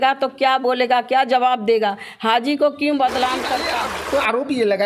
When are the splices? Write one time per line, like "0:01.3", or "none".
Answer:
0:03.7